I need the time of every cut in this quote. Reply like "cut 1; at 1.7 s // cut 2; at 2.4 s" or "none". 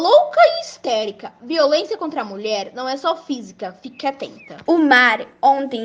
cut 1; at 4.6 s